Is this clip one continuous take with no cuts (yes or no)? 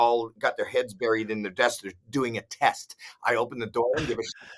yes